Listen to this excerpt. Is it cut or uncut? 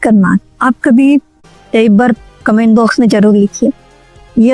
cut